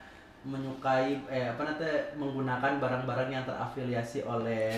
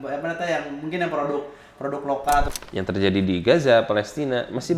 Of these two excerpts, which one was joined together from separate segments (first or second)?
second